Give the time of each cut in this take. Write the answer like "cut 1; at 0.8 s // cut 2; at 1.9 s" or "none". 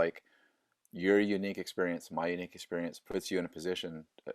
none